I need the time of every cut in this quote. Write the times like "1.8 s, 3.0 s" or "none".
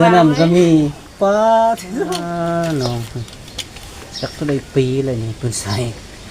2.1 s